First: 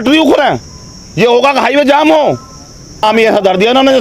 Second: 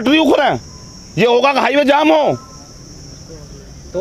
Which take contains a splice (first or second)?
first